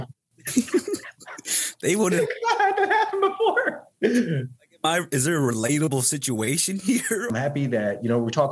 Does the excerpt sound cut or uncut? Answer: cut